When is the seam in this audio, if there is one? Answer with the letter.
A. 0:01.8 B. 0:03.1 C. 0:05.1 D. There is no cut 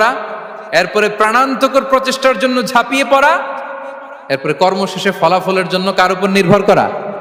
D